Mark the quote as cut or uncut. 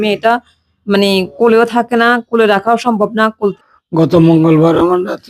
cut